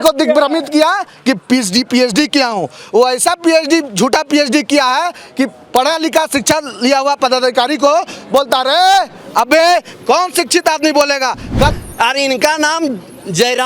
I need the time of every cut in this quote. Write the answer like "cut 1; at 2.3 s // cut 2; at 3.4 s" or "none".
cut 1; at 11.7 s

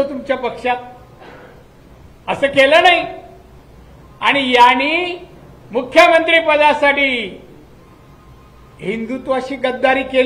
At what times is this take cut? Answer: none

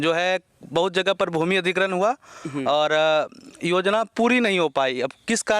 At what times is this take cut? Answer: none

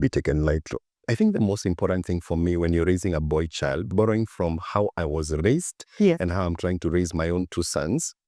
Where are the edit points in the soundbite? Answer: cut 1; at 1.1 s

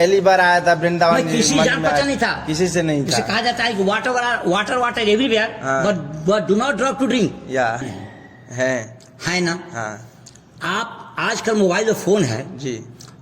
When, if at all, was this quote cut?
cut 1; at 7.9 s

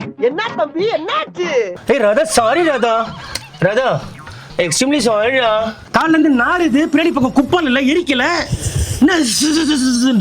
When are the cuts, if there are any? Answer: cut 1; at 5.8 s

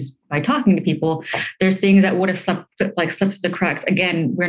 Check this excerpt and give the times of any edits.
none

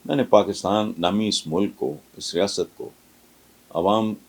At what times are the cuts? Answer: cut 1; at 0.9 s

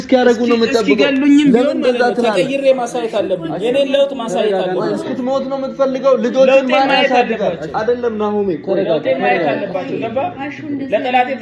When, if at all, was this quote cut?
none

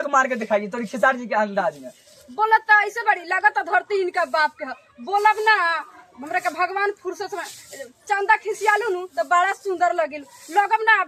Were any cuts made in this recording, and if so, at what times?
none

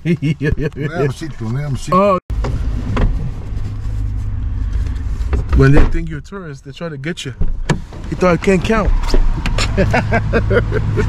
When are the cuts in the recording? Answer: cut 1; at 2.2 s

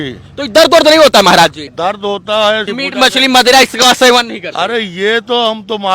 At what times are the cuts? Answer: cut 1; at 1.7 s // cut 2; at 2.6 s

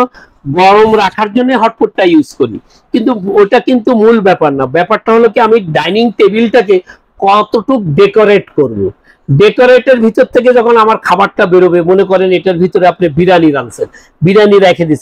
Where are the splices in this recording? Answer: none

